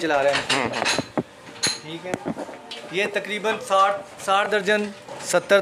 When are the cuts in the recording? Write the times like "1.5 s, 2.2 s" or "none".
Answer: none